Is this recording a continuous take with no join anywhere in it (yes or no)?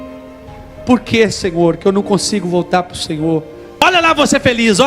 no